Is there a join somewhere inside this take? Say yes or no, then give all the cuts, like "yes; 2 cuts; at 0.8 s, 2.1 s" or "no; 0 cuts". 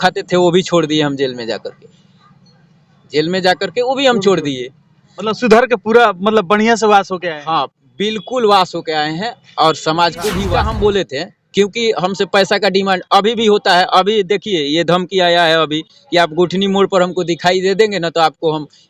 yes; 1 cut; at 10.4 s